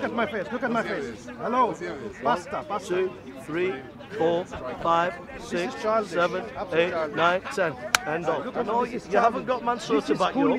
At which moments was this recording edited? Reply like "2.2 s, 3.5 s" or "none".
8.5 s